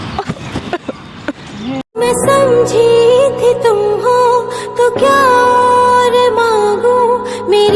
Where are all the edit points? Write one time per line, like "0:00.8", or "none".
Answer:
none